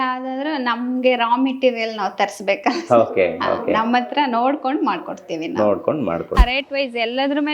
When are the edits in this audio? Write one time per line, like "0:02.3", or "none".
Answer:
0:06.4